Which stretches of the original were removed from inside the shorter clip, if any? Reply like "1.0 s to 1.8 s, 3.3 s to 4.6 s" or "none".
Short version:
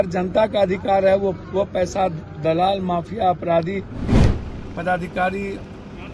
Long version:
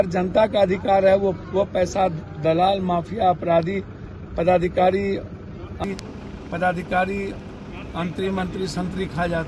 4.0 s to 5.8 s

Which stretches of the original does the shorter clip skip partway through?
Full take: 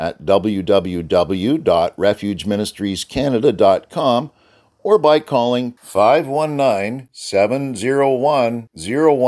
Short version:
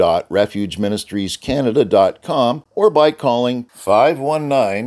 4.3 s to 4.7 s

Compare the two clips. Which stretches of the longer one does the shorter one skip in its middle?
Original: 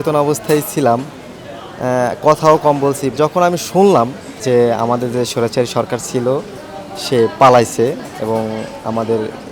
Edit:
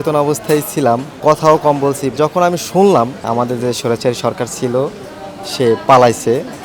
1.2 s to 2.2 s, 4.3 s to 4.8 s

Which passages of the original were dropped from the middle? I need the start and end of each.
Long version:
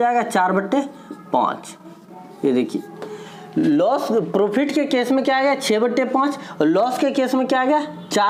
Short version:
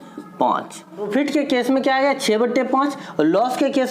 2.0 s to 4.5 s

